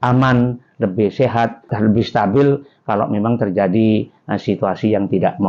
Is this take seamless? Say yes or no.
no